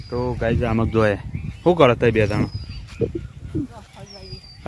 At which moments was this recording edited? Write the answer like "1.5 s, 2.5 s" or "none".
none